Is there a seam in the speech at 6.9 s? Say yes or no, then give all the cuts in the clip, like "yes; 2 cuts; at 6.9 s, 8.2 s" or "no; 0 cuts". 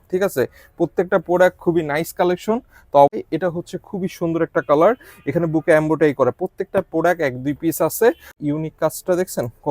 no; 2 cuts; at 3.2 s, 8.3 s